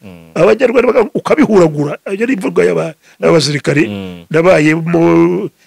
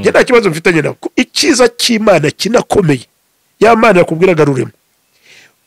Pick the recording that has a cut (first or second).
second